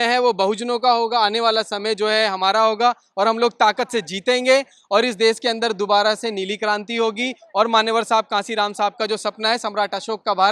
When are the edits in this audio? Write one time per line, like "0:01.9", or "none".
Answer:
none